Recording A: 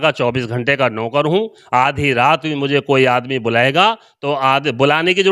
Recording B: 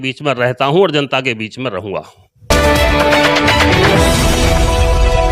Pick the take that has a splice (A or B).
B